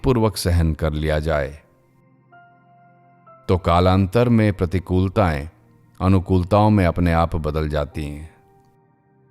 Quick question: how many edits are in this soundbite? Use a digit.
1